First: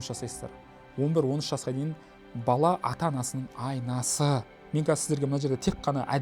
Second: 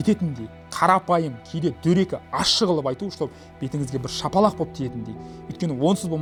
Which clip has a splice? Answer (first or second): first